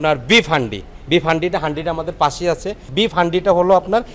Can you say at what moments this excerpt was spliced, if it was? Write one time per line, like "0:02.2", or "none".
0:02.8